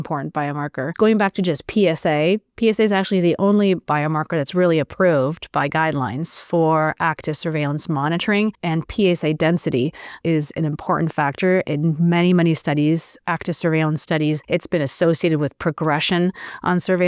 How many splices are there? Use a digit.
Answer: 3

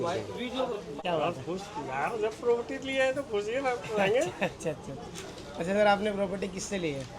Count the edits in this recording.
1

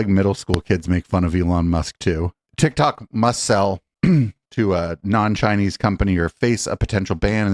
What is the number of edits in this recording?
1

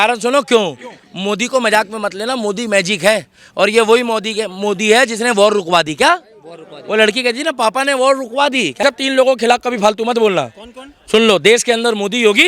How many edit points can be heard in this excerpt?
1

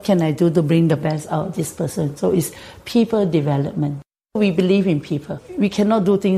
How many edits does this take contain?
2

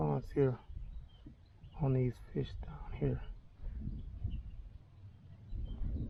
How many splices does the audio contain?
0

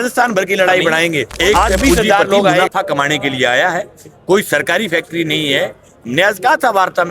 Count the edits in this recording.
1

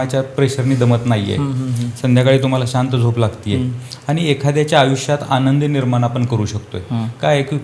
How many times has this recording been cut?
0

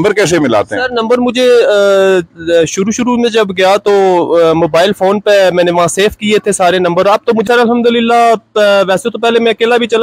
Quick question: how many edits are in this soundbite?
1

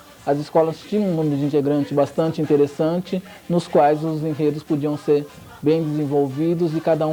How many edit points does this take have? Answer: 0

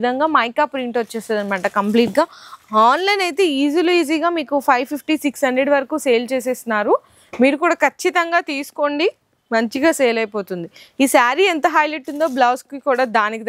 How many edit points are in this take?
0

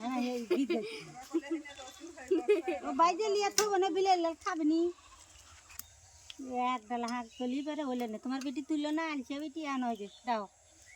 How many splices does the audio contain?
1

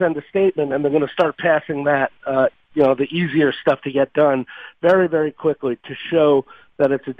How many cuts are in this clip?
0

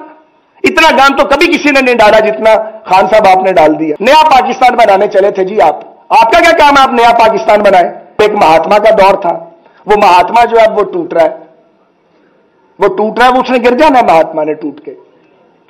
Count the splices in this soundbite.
2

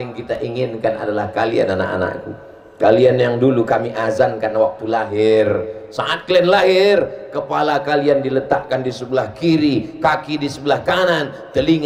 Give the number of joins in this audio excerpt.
0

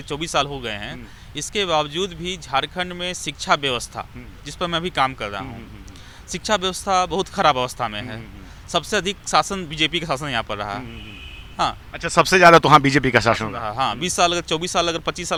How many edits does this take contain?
0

